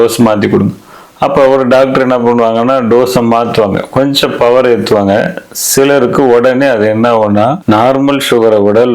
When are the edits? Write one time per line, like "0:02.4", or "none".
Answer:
0:07.6